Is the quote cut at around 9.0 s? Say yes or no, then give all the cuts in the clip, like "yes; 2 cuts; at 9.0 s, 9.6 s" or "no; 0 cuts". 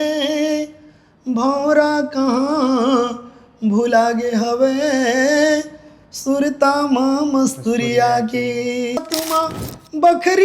yes; 1 cut; at 9.0 s